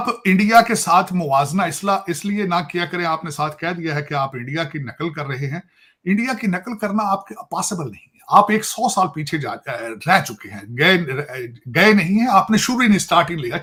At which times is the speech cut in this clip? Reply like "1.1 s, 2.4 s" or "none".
none